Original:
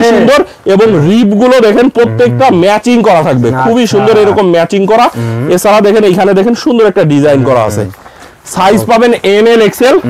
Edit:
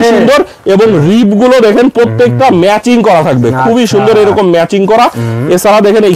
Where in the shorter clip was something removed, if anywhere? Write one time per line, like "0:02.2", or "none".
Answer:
none

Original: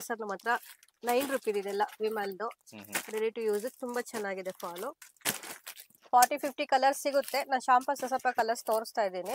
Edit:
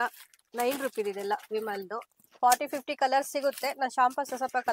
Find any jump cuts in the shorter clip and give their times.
0:02.2

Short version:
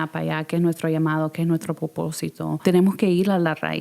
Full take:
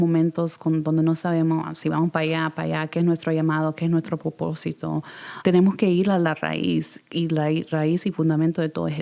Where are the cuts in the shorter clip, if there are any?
0:02.6

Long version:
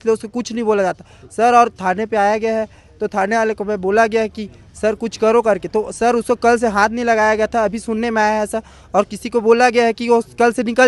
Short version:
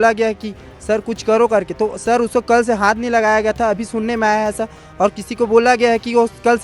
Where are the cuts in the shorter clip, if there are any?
none

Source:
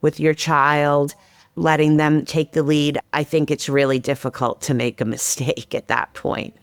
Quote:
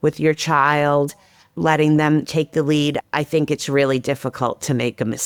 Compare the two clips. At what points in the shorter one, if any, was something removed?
none

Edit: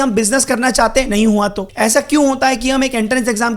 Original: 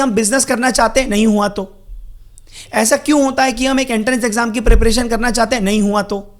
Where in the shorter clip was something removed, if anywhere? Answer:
0:01.6

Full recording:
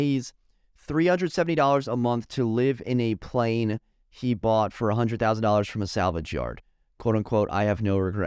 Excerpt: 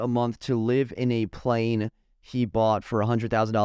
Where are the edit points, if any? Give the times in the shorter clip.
none

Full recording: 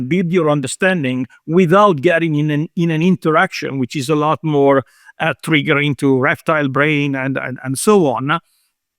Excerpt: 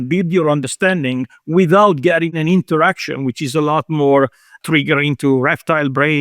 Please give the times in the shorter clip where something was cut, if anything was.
0:02.3
0:04.5

